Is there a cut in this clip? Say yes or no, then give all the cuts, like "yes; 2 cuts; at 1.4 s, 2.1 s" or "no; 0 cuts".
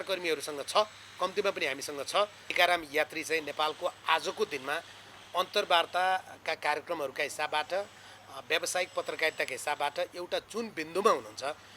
yes; 1 cut; at 2.4 s